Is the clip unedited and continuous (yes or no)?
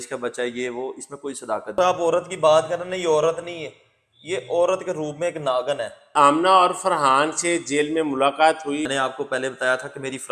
no